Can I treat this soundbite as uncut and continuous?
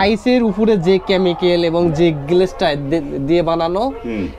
yes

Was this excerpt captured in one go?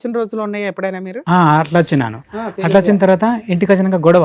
yes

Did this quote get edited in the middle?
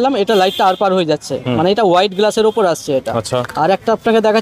no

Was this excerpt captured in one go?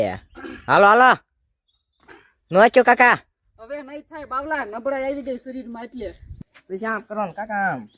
no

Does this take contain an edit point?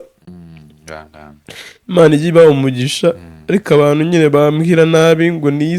no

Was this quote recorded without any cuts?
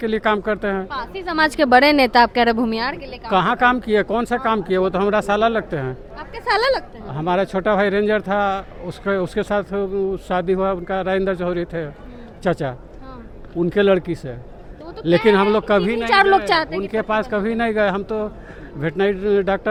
yes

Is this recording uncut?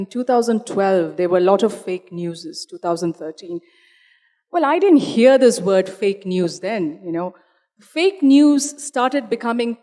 yes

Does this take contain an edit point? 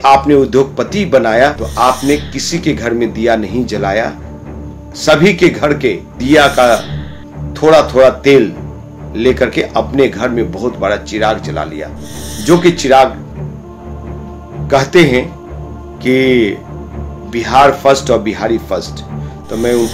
yes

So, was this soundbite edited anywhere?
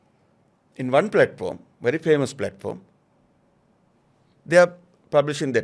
no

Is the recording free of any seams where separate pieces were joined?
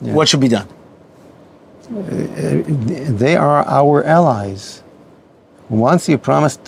yes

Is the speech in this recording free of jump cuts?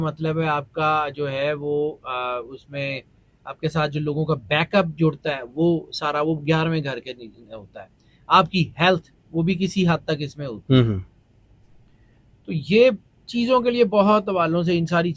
yes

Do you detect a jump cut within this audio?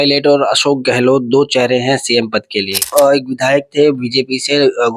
yes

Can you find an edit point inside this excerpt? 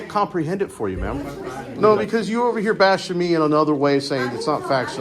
yes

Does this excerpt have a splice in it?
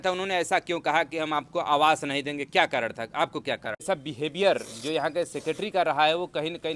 yes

